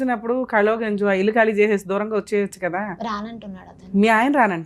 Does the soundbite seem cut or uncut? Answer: uncut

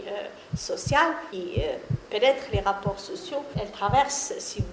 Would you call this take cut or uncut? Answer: cut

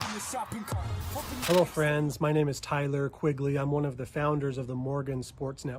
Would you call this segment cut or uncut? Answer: cut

